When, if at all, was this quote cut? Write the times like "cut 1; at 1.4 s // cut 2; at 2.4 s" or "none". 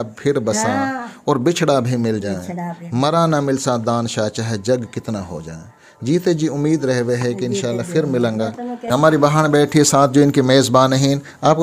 none